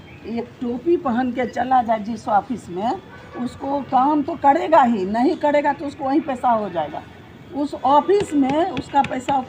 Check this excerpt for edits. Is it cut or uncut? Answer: uncut